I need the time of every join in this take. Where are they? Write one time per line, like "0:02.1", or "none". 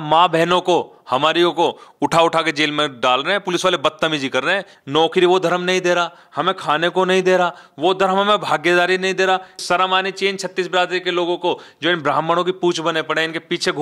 0:04.7
0:09.6